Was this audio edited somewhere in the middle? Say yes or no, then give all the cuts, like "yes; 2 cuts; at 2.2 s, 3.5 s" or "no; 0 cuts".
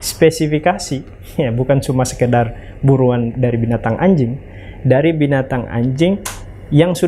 no; 0 cuts